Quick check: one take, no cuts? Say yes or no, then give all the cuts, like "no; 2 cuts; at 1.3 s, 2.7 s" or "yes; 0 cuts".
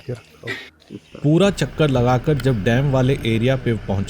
no; 1 cut; at 1.1 s